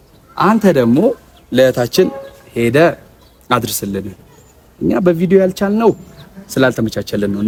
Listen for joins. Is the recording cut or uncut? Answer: uncut